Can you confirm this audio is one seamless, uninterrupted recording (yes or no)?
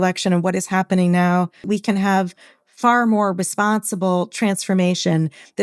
no